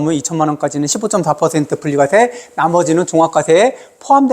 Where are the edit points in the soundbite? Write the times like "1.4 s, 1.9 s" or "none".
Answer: none